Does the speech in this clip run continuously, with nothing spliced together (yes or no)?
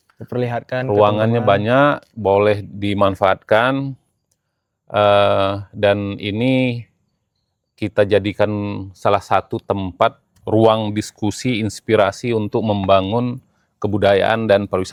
yes